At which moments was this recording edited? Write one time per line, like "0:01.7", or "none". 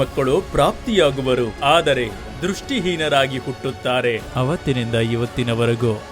0:01.5
0:04.3